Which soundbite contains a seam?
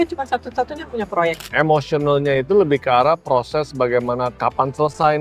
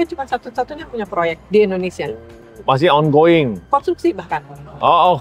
first; 1 cut; at 1.4 s

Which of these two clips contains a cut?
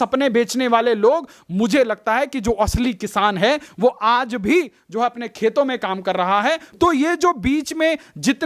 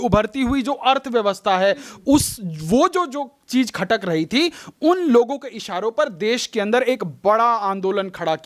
first; 1 cut; at 6.7 s

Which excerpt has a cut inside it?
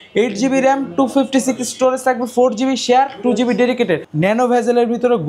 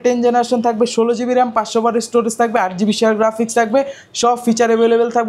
first; 1 cut; at 4.1 s

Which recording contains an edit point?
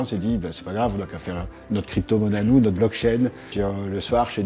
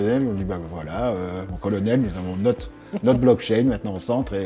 first; 1 cut; at 3.5 s

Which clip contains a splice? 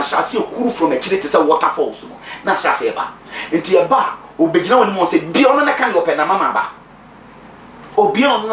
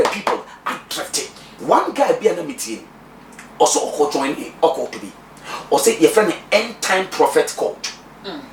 second; 1 cut; at 1.5 s

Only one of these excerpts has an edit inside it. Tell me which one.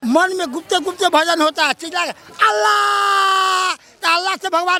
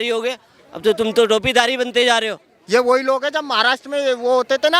second; 1 cut; at 2.5 s

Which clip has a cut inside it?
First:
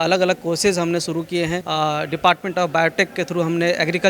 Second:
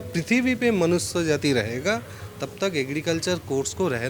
first; 1 cut; at 1.6 s

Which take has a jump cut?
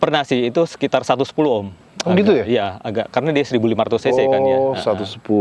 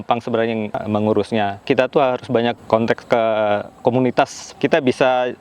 second; 4 cuts; at 0.8 s, 1.6 s, 2.6 s, 4.4 s

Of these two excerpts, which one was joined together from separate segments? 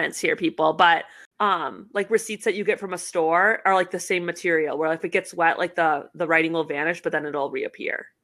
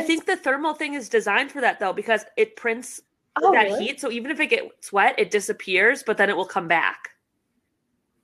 first; 1 cut; at 1.2 s

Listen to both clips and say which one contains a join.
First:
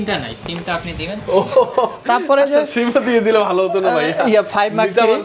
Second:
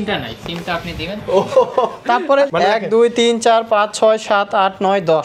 second; 1 cut; at 2.5 s

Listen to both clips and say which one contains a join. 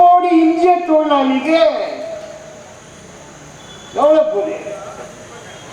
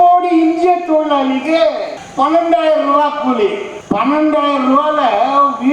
second; 2 cuts; at 2.0 s, 3.7 s

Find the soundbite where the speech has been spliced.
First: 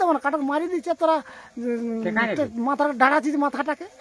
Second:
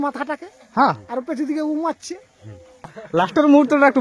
second; 1 cut; at 3.0 s

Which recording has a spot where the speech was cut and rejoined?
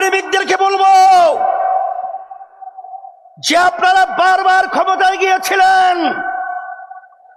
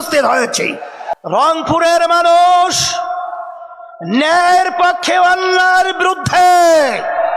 second; 1 cut; at 1.1 s

